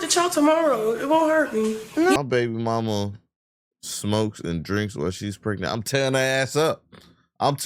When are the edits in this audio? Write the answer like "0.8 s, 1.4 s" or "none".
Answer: 2.2 s